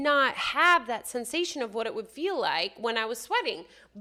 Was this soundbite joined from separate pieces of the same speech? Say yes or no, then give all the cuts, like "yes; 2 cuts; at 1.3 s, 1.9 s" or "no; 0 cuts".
no; 0 cuts